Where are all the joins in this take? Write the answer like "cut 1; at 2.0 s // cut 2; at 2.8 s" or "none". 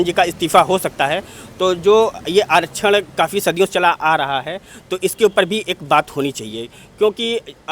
none